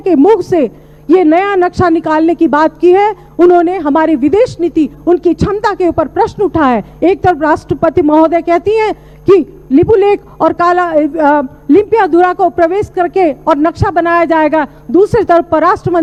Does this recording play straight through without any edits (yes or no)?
yes